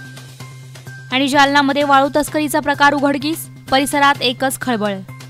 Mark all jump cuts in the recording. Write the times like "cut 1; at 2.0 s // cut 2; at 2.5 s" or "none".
cut 1; at 1.0 s